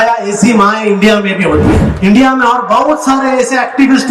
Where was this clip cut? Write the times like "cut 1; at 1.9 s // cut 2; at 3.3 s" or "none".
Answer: cut 1; at 1.9 s